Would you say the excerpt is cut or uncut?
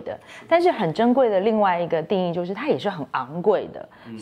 uncut